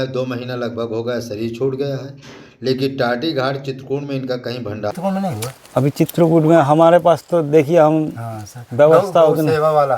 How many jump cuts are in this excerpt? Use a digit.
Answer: 1